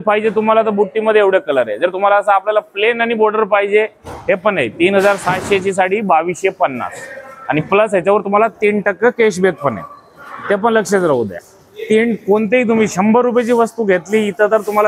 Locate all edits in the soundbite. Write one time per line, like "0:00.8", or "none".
none